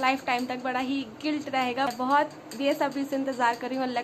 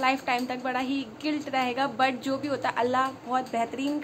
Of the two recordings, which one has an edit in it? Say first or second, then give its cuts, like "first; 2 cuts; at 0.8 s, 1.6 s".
first; 1 cut; at 1.9 s